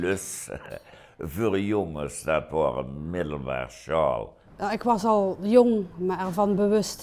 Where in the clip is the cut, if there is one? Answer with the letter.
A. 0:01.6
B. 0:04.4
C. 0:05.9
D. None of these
B